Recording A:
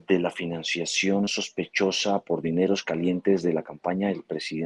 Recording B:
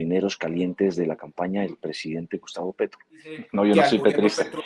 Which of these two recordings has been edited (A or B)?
B